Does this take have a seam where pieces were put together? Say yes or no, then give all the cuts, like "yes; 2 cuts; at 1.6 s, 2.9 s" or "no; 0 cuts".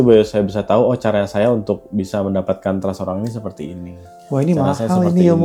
no; 0 cuts